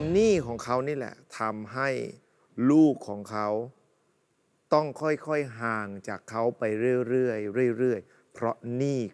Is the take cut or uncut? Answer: uncut